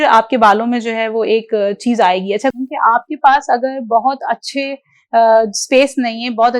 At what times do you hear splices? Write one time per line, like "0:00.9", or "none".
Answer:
0:02.5